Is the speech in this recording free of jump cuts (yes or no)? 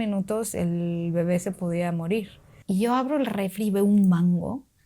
no